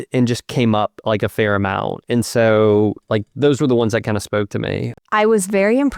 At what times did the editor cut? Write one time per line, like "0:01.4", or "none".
0:04.9